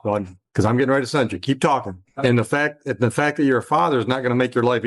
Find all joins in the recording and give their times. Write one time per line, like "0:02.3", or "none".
0:02.0

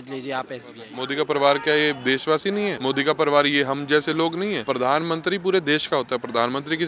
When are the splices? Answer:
0:00.9
0:02.8
0:04.6

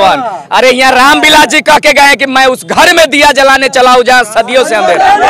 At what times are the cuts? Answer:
none

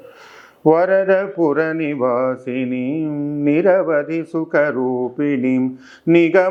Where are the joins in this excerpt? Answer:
none

